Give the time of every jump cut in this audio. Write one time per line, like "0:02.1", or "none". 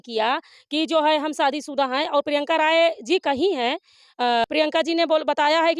0:04.0